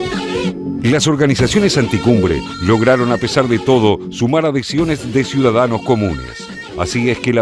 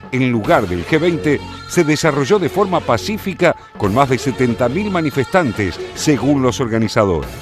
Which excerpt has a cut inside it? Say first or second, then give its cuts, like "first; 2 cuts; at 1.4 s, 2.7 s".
second; 1 cut; at 2.4 s